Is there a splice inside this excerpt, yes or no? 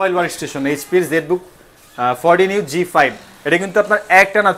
no